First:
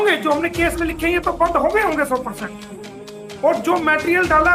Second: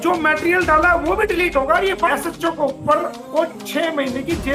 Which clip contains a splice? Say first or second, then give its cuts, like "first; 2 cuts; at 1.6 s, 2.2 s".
second; 1 cut; at 2.1 s